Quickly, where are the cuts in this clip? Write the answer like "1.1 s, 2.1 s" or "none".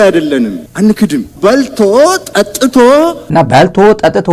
1.3 s